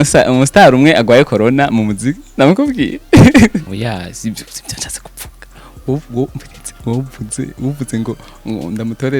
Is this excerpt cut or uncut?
cut